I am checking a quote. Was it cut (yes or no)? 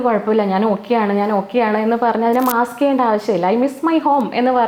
no